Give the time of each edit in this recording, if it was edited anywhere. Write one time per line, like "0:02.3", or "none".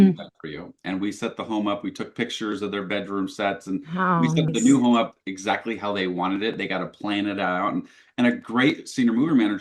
0:04.5